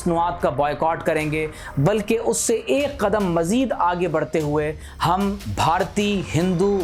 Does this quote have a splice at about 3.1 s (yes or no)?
no